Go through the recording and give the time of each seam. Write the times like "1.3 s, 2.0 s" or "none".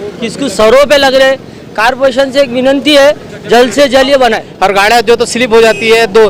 4.5 s